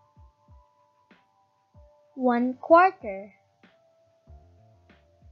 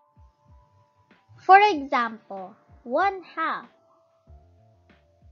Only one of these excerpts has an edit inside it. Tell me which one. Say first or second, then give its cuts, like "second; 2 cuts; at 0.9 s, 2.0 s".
second; 2 cuts; at 1.3 s, 3.7 s